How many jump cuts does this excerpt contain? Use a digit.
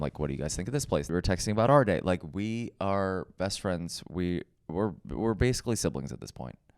1